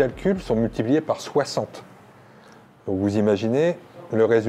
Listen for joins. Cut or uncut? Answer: uncut